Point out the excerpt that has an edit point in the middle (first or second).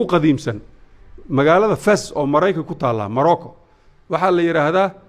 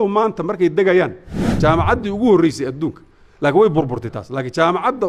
second